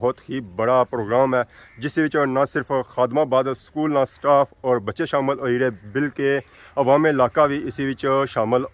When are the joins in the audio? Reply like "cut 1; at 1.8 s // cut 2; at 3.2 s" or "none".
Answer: none